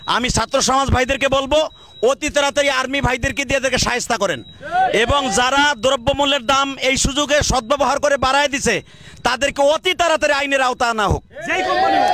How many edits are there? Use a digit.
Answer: 0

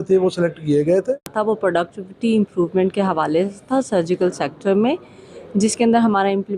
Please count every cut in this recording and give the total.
1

